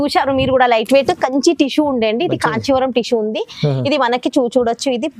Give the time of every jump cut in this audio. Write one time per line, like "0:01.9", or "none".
none